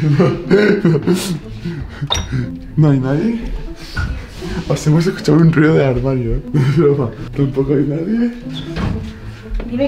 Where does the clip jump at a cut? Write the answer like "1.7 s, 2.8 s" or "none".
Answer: 6.4 s, 7.2 s, 8.5 s